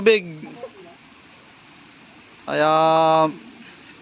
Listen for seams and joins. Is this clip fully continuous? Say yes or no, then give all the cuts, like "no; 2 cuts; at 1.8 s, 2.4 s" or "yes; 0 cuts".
yes; 0 cuts